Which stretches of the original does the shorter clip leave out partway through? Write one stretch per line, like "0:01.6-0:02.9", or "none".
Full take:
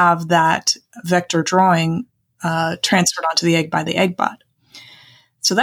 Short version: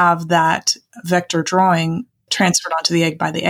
0:02.3-0:02.8